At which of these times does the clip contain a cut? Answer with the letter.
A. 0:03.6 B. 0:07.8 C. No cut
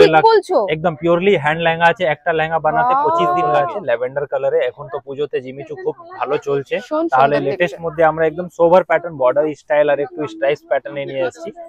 A